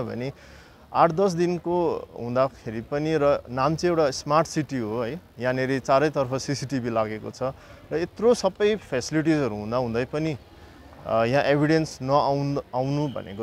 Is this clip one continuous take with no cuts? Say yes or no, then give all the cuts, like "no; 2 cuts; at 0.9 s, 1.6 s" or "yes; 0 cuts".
yes; 0 cuts